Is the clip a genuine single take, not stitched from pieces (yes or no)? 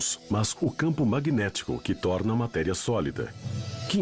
yes